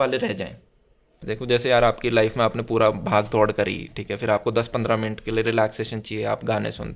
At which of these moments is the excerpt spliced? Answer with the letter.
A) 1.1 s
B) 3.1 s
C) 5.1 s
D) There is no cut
A